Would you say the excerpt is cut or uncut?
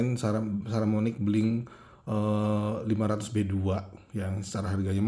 uncut